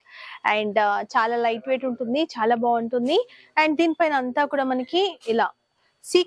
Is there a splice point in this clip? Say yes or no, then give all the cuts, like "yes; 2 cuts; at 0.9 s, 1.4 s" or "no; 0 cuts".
no; 0 cuts